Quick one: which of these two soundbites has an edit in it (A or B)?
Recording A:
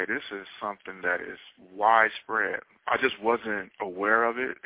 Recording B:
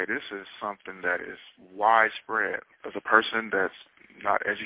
B